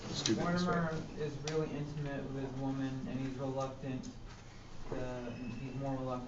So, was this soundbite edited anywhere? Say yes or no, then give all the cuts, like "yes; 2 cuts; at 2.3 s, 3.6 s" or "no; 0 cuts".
yes; 1 cut; at 3.4 s